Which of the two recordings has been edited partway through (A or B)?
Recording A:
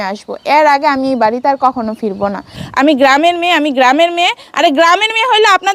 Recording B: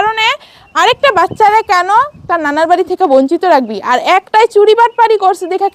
A